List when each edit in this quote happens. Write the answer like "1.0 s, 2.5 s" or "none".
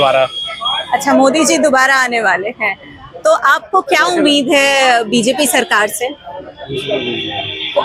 none